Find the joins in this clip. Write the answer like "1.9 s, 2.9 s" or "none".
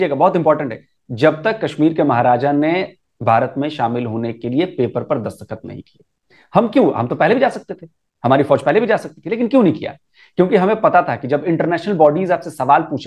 none